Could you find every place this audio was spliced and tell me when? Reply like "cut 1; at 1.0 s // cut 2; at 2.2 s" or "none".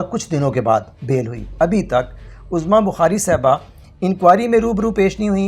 cut 1; at 1.4 s

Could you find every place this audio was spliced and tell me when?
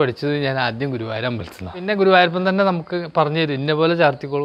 cut 1; at 1.9 s

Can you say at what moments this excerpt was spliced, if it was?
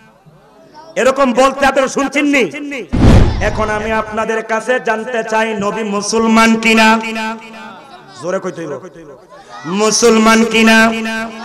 cut 1; at 3.2 s

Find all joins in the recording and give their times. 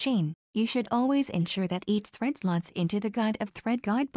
none

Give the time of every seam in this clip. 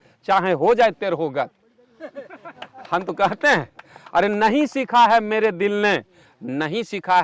none

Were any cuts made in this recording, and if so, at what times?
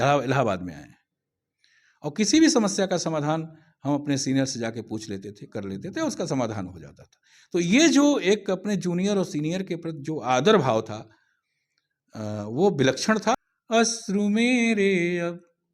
cut 1; at 13.4 s

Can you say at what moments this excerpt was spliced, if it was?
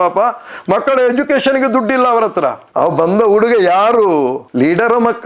cut 1; at 2.6 s

